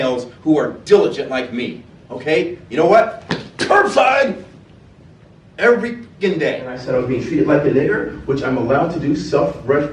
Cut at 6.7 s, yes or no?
yes